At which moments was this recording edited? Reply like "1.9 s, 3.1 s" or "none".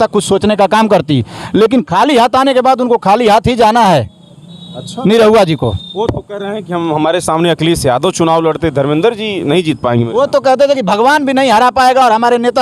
none